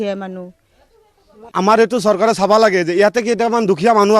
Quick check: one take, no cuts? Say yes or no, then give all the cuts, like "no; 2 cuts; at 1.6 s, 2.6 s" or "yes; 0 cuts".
no; 1 cut; at 1.4 s